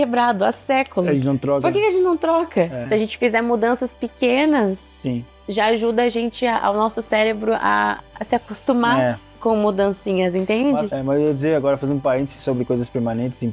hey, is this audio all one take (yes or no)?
no